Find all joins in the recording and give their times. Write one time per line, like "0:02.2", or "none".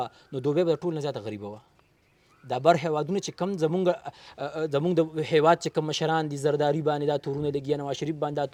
none